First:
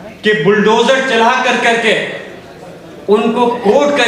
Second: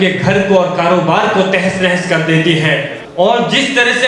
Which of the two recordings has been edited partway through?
second; 1 cut; at 3.0 s

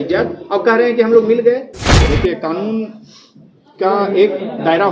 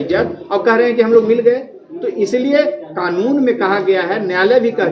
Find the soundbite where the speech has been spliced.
first; 1 cut; at 2.0 s

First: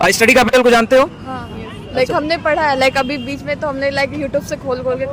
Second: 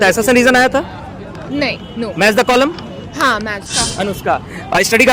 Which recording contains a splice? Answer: second; 1 cut; at 3.6 s

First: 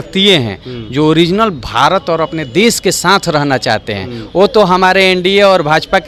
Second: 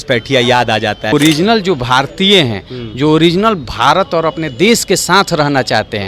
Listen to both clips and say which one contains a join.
second; 1 cut; at 1.1 s

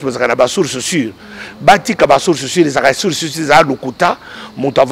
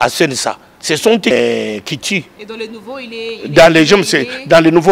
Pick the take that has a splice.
second; 1 cut; at 1.3 s

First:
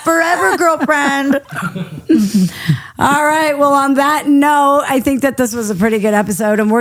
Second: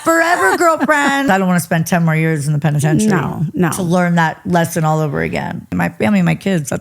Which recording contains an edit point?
second; 2 cuts; at 1.3 s, 5.7 s

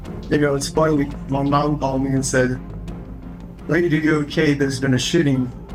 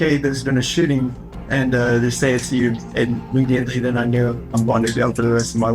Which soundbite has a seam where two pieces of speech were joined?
second; 2 cuts; at 2.8 s, 4.5 s

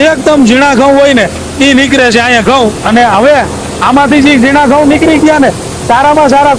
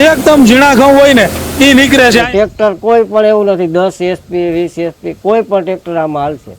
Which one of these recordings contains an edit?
second; 1 cut; at 2.2 s

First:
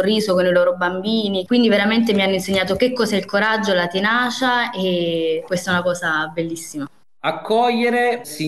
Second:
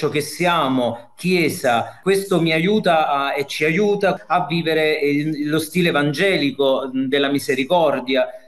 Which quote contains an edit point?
first; 2 cuts; at 1.4 s, 7.0 s

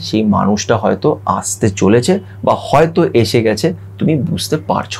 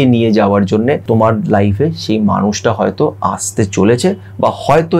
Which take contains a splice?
second; 1 cut; at 1.0 s

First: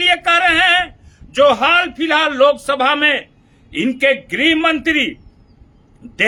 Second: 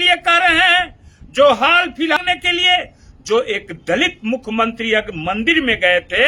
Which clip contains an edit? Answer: second; 1 cut; at 2.2 s

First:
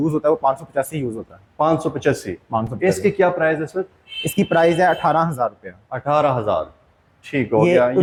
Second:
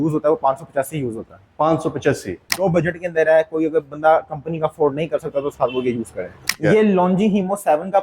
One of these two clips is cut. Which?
second; 2 cuts; at 2.6 s, 6.5 s

